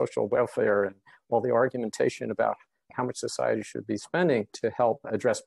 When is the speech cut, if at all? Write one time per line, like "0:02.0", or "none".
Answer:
0:02.9